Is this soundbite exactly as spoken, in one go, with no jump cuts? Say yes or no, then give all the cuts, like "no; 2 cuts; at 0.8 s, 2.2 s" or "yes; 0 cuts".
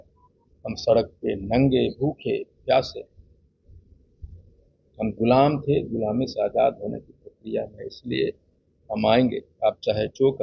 yes; 0 cuts